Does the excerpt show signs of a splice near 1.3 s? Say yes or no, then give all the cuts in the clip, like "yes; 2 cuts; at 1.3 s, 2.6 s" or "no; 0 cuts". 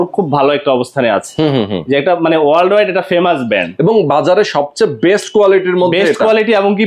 no; 0 cuts